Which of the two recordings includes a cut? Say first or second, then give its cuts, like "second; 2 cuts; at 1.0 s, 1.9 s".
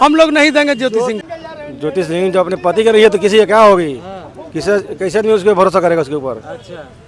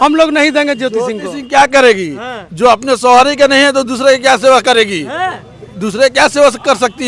first; 1 cut; at 1.3 s